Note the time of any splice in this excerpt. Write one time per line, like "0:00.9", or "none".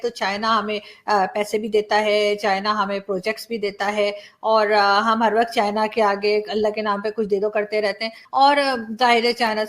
0:08.2